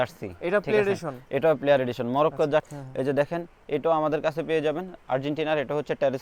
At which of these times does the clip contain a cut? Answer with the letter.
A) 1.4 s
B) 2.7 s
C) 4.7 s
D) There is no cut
B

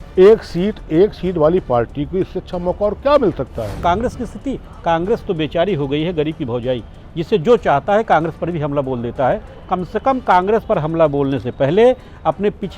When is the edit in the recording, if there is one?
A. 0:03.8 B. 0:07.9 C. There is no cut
A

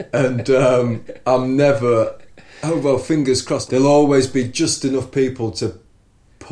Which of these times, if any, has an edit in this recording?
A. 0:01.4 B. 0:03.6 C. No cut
B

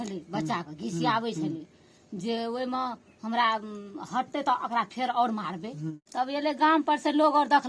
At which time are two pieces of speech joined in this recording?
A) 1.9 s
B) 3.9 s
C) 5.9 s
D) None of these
C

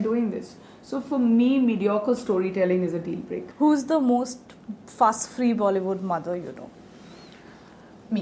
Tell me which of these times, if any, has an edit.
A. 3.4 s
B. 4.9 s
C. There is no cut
A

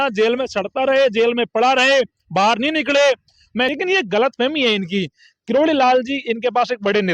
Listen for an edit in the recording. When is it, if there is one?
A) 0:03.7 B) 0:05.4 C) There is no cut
A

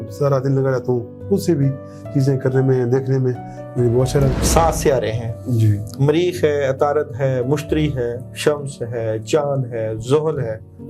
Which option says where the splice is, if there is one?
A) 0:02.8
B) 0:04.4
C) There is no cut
B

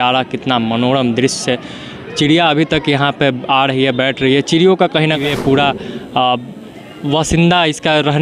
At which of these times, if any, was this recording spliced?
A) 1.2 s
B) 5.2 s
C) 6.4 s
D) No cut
B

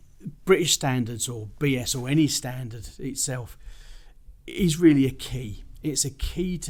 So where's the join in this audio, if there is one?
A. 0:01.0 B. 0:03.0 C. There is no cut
C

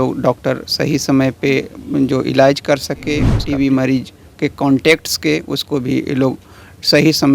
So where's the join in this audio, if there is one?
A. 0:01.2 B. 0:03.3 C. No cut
B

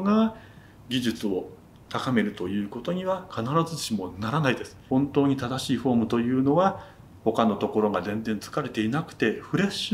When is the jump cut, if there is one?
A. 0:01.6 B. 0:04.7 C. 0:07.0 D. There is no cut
B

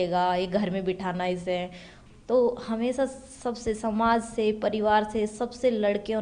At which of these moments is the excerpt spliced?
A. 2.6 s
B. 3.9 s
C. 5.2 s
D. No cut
D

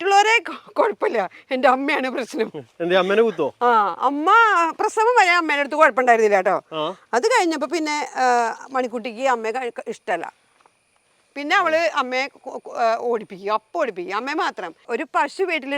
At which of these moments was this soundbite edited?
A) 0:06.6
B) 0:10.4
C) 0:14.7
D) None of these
C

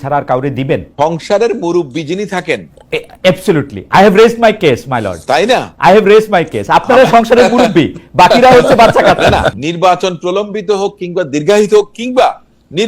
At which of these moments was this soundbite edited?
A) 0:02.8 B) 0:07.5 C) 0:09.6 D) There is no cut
C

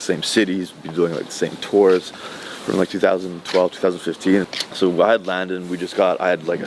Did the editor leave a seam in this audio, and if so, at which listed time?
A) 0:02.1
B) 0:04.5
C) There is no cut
B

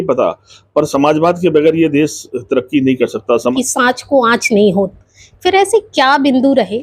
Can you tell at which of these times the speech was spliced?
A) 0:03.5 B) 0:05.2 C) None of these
A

